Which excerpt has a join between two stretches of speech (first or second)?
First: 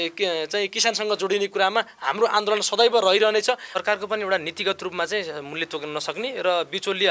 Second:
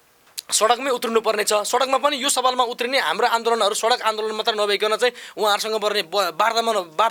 first